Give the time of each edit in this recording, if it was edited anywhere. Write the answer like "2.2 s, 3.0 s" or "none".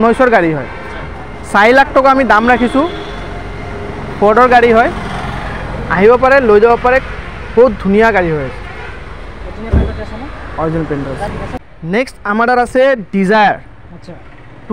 11.6 s